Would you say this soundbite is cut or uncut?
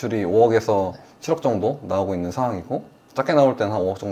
uncut